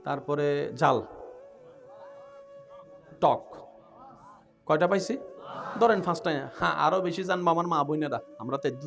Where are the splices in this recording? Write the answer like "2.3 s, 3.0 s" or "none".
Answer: 1.7 s, 3.0 s